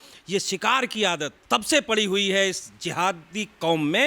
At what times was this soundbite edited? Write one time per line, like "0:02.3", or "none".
0:01.3